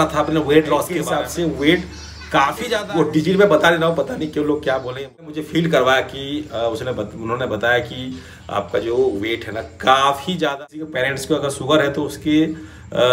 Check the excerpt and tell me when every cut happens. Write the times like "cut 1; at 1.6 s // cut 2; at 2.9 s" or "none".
cut 1; at 1.0 s // cut 2; at 2.7 s // cut 3; at 5.3 s // cut 4; at 10.5 s